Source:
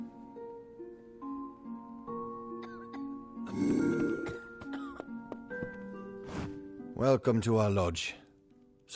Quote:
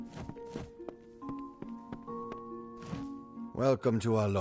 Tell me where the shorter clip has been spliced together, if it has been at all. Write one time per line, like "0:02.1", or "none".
0:03.5